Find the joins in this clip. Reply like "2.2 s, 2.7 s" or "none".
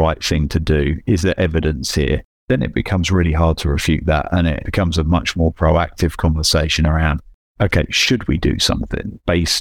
2.4 s